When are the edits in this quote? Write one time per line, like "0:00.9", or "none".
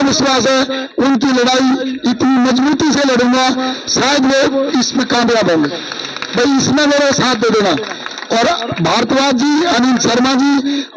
none